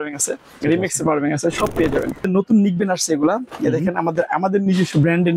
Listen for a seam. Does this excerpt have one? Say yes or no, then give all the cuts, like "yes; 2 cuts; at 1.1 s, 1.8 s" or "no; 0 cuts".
yes; 1 cut; at 2.2 s